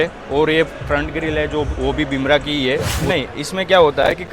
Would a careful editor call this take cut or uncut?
cut